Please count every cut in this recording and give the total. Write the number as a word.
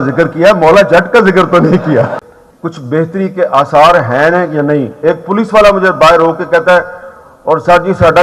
one